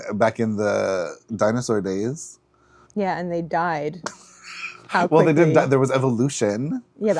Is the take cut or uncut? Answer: cut